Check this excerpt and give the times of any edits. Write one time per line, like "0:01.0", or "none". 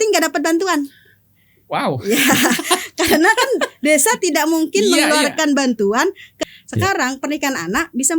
0:06.3